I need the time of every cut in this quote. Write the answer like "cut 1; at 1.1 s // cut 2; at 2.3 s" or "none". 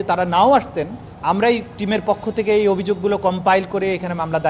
cut 1; at 1.0 s

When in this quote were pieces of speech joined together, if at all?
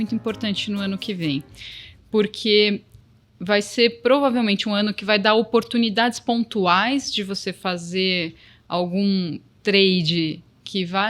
none

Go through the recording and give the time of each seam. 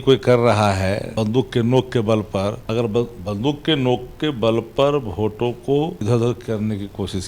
cut 1; at 1.1 s // cut 2; at 2.6 s // cut 3; at 6.0 s

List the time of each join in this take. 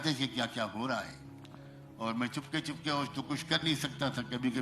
none

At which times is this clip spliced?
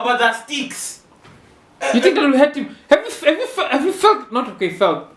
none

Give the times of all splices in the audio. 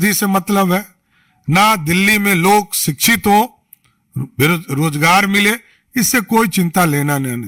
none

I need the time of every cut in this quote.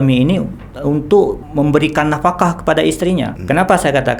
cut 1; at 1.4 s // cut 2; at 3.4 s

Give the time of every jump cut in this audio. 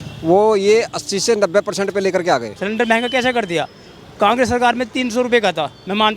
cut 1; at 2.6 s

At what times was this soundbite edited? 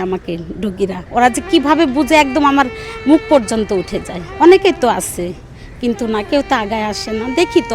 cut 1; at 1.0 s // cut 2; at 4.2 s

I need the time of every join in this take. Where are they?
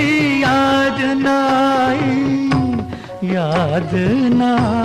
none

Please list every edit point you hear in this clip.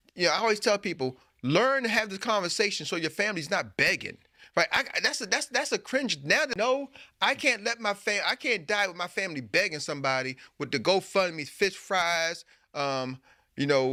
none

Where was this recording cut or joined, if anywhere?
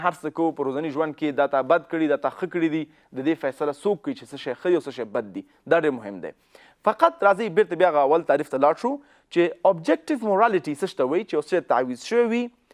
none

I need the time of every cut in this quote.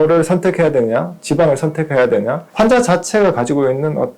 cut 1; at 2.5 s

